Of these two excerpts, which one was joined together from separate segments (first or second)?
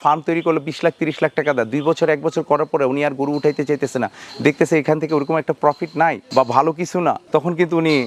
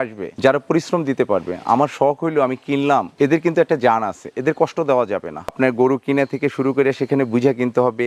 second